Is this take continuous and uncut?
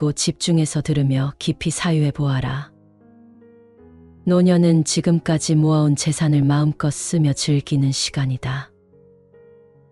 no; 2 cuts; at 2.7 s, 4.2 s

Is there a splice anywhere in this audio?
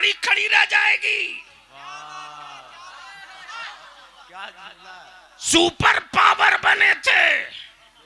no; 0 cuts

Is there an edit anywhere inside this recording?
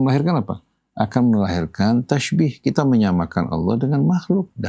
no; 0 cuts

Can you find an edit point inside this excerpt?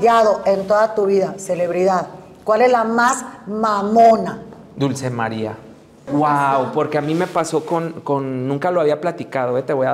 yes; 1 cut; at 6.1 s

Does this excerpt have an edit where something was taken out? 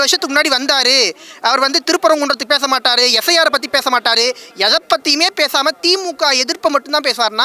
no; 0 cuts

